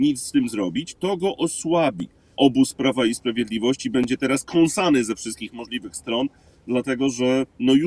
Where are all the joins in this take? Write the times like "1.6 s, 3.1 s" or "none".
2.3 s